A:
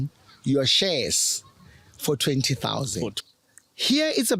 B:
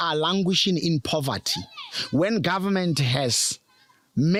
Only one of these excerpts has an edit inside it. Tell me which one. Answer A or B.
A